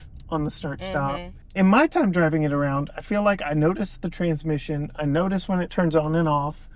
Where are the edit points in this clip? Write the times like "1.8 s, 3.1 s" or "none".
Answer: 1.4 s